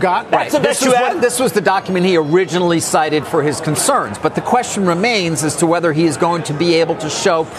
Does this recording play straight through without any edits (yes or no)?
yes